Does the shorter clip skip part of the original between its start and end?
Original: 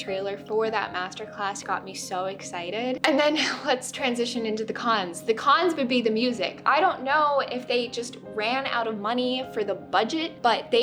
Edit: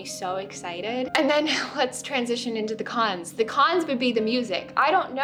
no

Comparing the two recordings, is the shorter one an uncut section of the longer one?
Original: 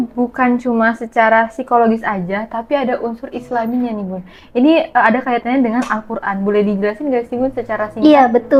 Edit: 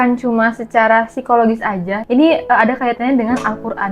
no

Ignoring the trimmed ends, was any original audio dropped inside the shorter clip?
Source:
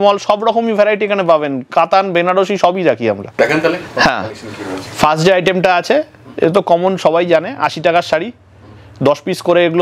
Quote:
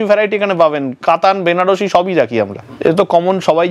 yes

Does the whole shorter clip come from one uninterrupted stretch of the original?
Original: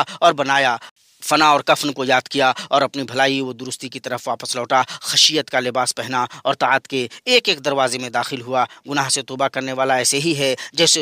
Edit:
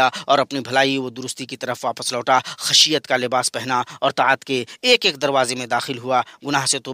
yes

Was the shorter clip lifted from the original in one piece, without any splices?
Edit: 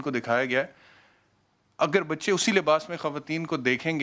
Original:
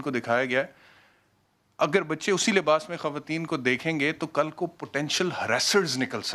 yes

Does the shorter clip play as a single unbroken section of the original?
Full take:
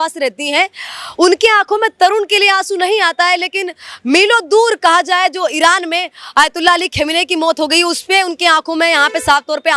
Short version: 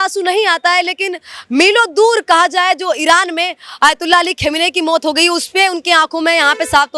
yes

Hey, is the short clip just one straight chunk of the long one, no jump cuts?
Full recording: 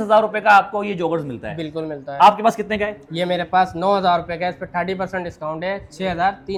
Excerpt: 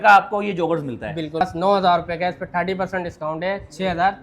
no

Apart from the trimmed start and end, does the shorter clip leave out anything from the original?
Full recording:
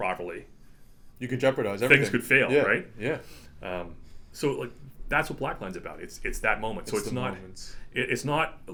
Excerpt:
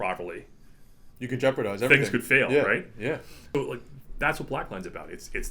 yes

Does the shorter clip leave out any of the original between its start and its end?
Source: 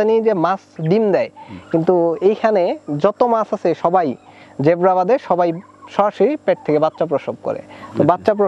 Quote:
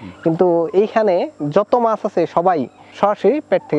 yes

